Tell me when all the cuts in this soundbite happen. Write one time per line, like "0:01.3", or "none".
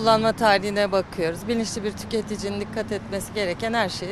none